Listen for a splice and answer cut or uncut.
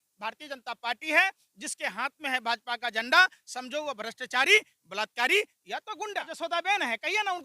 cut